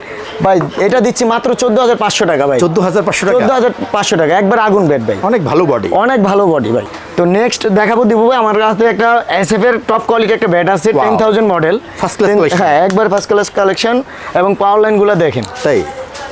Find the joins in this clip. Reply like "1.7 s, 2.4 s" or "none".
7.0 s